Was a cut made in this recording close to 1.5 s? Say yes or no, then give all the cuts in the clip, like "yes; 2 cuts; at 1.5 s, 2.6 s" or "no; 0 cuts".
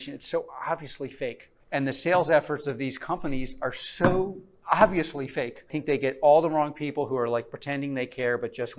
yes; 2 cuts; at 1.5 s, 5.7 s